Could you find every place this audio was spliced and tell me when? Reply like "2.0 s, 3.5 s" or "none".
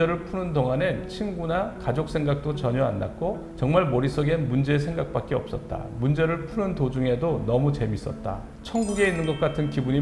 none

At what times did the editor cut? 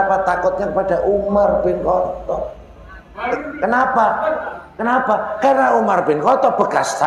none

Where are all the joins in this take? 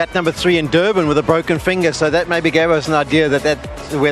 2.6 s

